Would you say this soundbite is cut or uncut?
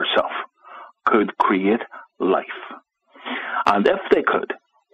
cut